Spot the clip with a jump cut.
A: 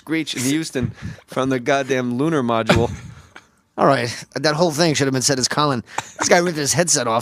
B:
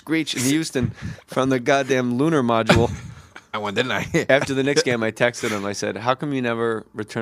A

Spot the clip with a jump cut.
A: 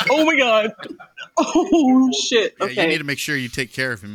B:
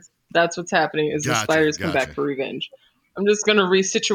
A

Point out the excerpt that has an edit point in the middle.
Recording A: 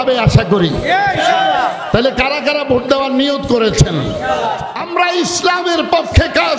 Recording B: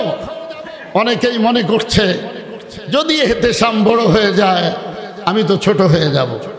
A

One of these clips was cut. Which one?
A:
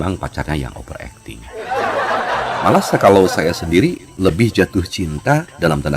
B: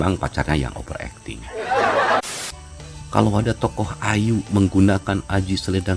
B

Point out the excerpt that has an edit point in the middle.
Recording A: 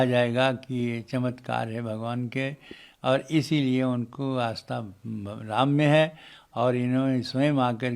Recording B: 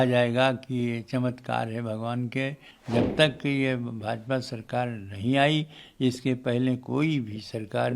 B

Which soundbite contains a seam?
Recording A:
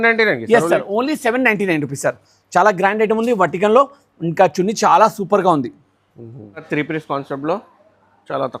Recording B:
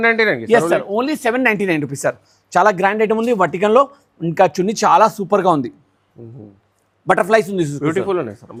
A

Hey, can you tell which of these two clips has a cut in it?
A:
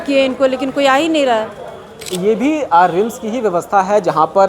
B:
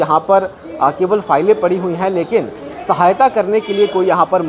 A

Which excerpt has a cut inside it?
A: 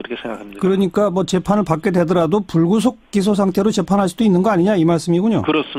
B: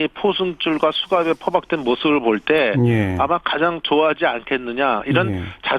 B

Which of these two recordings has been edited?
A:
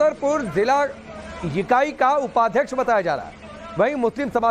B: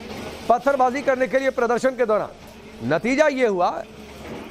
A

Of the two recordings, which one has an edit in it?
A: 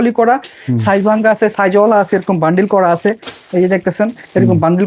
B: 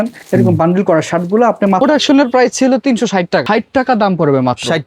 B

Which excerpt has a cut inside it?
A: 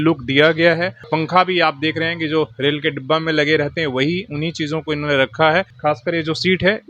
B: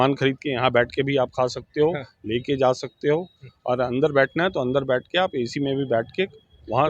A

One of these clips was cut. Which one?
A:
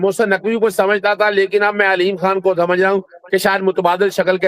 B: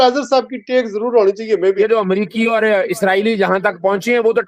B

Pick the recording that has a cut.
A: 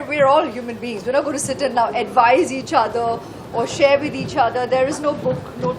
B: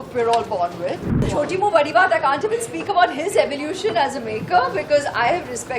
B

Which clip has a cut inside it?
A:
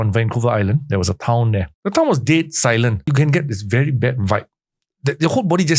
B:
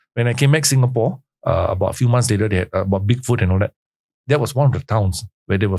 A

